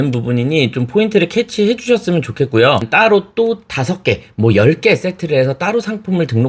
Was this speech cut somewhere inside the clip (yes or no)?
yes